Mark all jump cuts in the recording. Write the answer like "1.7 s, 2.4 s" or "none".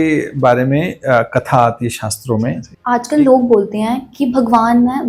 2.7 s